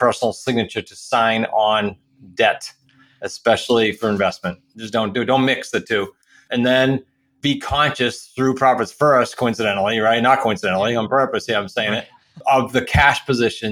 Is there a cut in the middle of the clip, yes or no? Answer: yes